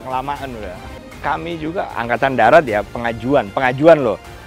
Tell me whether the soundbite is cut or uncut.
cut